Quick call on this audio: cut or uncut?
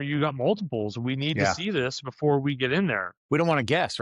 cut